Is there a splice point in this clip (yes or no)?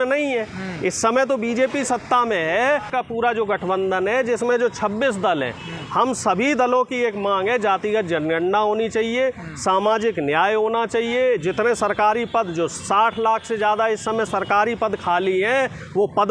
yes